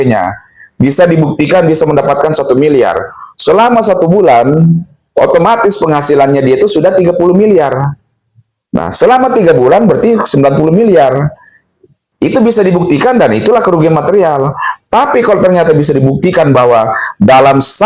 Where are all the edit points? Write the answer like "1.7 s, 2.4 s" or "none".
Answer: none